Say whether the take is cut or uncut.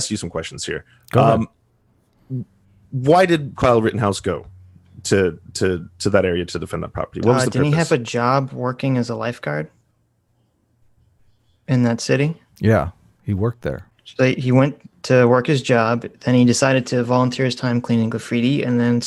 uncut